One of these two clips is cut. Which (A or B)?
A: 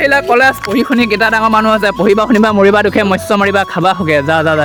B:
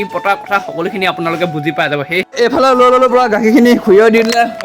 B